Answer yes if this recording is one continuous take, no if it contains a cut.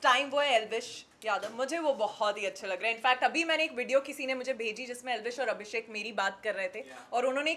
yes